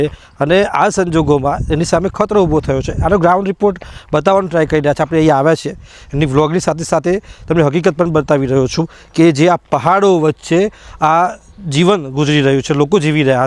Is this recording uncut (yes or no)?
yes